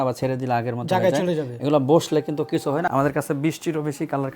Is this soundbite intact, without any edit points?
no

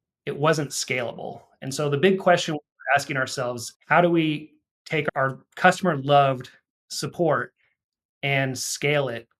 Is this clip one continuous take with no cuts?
no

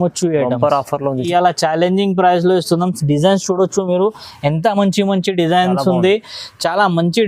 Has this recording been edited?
yes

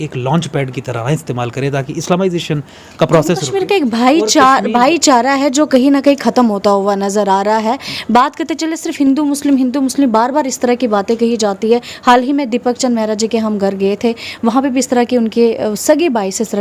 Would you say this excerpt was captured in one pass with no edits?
yes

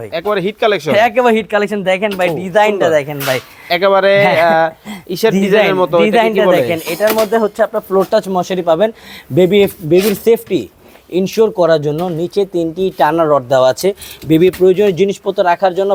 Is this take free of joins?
yes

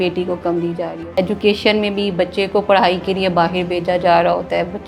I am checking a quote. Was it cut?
yes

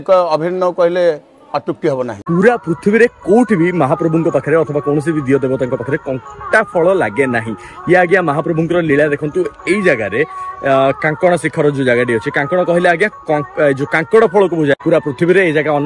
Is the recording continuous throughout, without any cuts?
no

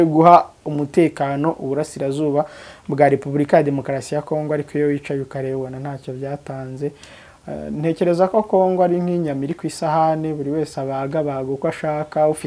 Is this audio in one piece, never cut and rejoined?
yes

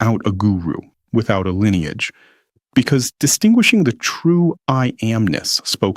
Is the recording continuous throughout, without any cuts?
yes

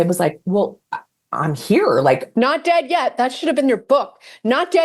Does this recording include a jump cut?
no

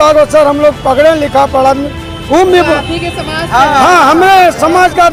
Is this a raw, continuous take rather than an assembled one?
yes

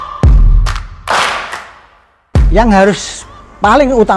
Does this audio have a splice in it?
yes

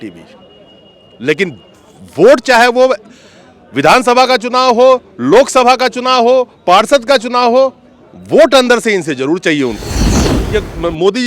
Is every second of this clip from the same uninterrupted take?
no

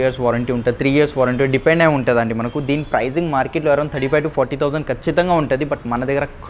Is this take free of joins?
yes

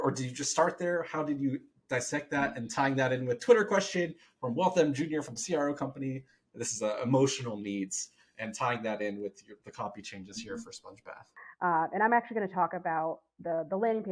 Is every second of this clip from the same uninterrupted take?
no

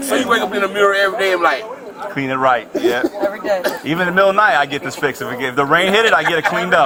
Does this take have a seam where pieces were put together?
no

